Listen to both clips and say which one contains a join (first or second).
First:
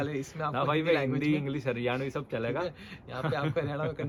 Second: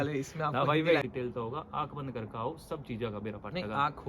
second